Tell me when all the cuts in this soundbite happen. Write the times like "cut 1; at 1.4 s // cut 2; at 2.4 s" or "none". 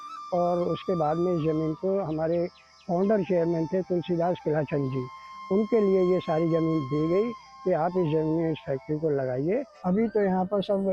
cut 1; at 9.7 s